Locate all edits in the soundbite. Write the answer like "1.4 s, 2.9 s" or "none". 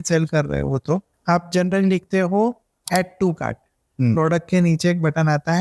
1.1 s, 2.7 s